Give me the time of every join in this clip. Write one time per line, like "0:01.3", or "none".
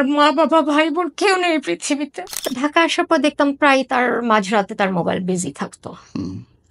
0:02.3